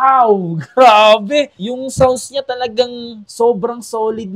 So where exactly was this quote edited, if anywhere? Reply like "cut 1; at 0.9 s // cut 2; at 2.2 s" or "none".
none